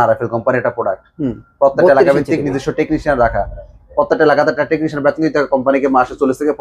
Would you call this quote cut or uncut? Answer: uncut